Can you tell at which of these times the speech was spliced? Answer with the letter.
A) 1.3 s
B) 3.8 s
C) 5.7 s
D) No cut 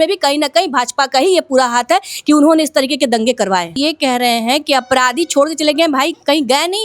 B